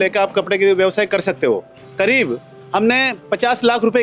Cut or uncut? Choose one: cut